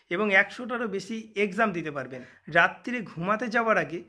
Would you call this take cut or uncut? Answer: cut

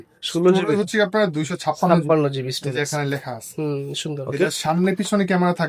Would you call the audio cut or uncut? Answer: uncut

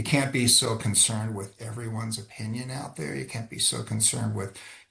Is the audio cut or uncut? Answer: uncut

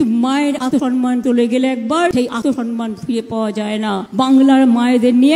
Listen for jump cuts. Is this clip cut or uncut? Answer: cut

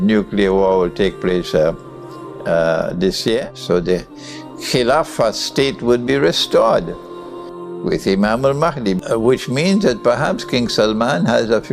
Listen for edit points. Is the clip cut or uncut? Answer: cut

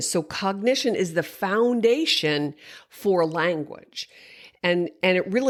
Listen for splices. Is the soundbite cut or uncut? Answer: uncut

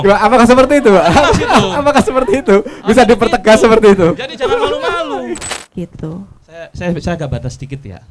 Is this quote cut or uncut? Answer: cut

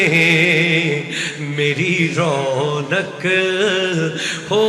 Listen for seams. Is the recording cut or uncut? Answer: uncut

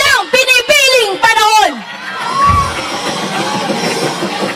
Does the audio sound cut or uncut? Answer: uncut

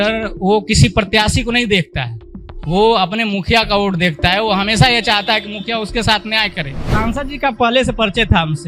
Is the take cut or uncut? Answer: cut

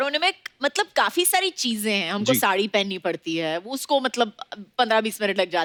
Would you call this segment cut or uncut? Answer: uncut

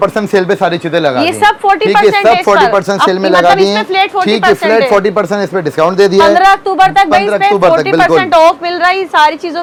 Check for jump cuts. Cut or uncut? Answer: uncut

